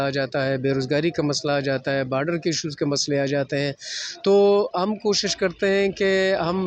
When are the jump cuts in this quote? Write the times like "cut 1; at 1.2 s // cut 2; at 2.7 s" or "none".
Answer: none